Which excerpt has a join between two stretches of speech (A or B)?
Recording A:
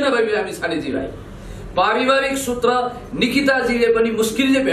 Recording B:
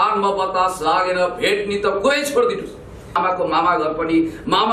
B